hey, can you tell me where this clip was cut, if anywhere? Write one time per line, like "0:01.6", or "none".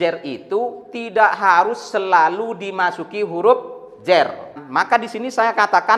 0:04.6